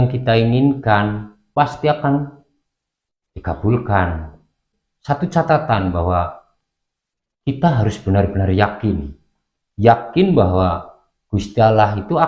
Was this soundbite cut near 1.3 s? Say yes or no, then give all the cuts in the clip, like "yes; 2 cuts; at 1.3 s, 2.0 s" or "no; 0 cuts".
yes; 1 cut; at 1.3 s